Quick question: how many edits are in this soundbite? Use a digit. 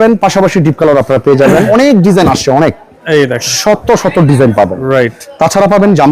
2